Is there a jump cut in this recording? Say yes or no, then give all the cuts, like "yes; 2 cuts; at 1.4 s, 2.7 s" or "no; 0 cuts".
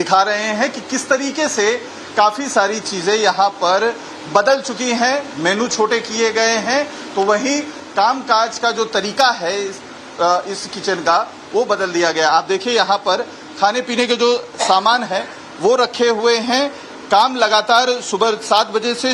no; 0 cuts